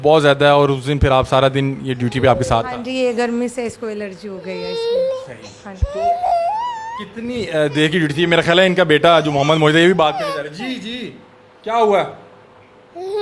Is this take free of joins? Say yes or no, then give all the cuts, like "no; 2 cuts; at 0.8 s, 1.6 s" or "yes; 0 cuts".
yes; 0 cuts